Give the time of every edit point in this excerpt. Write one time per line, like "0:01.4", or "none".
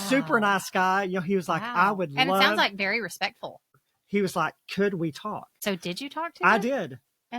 0:03.6
0:05.5